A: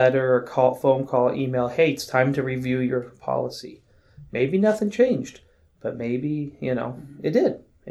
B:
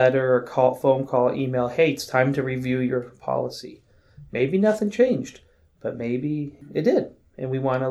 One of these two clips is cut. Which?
B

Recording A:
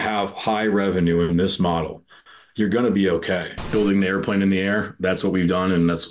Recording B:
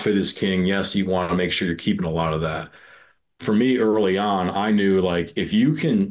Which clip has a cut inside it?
A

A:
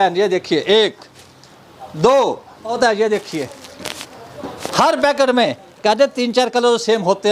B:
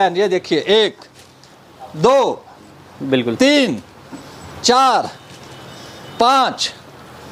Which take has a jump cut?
A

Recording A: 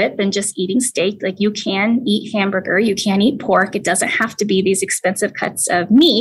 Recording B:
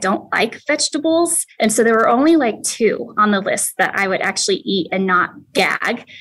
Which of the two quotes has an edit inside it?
B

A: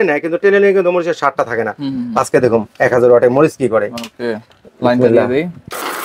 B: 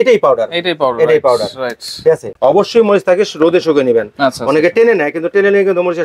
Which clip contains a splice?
B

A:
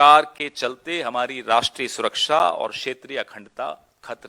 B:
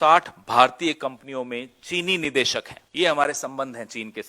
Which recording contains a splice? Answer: B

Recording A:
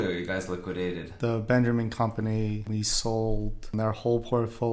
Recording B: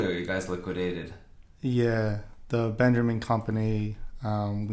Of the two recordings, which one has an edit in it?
A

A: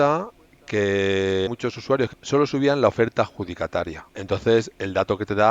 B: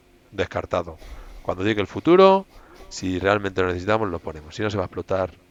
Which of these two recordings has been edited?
A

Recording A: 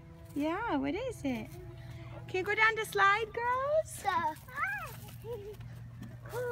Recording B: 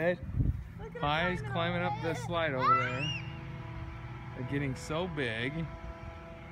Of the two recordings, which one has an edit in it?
A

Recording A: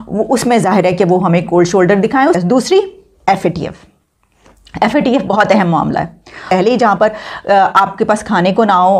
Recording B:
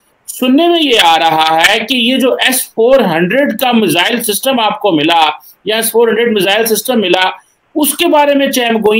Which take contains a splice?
A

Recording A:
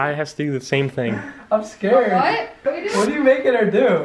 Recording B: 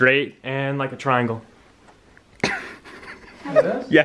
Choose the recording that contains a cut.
A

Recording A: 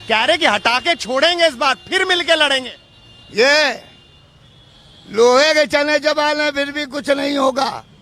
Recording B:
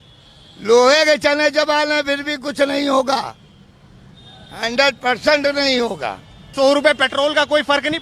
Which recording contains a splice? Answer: B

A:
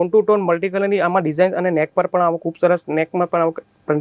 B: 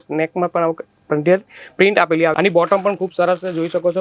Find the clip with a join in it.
B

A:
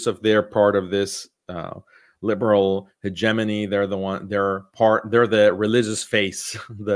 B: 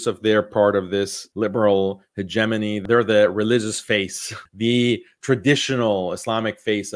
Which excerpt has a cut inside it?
B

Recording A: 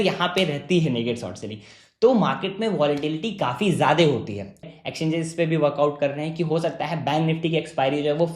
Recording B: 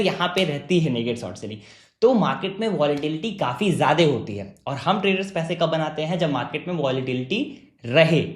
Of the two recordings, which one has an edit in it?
A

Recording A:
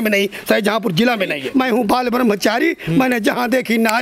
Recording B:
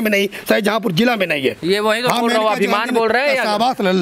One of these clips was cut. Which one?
A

